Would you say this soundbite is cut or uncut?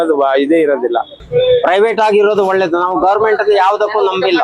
cut